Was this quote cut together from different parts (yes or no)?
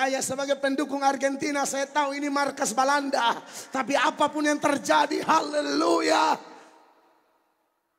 no